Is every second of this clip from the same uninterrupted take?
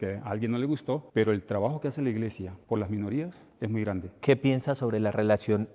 yes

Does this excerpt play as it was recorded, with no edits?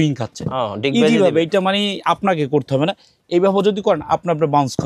yes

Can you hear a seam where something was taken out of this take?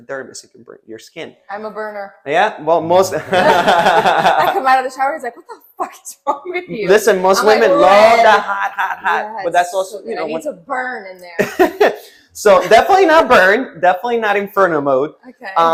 no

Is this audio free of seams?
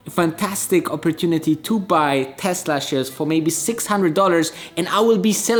yes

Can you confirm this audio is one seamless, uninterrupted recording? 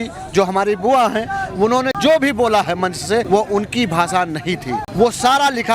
no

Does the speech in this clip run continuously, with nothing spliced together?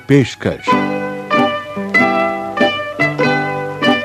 yes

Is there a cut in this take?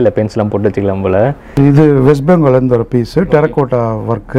yes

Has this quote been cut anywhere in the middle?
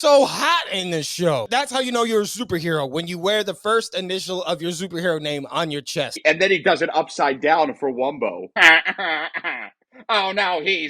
yes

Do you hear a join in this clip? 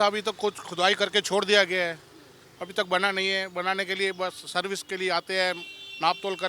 no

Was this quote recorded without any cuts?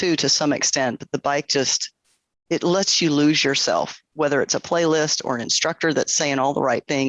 yes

